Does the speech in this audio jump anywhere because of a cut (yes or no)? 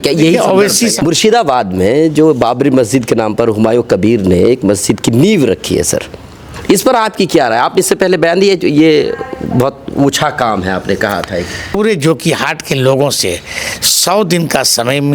yes